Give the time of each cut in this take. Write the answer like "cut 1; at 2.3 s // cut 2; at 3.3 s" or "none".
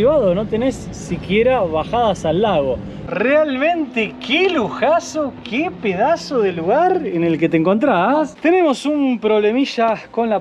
cut 1; at 3.0 s // cut 2; at 8.3 s